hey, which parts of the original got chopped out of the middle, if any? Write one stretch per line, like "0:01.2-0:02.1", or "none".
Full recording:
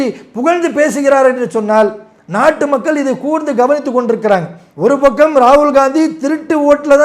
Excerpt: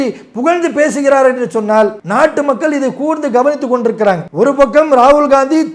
0:02.0-0:02.2
0:04.5-0:04.7